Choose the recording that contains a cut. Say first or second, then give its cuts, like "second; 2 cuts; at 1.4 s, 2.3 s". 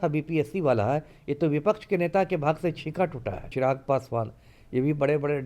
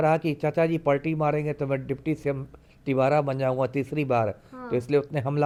first; 1 cut; at 3.5 s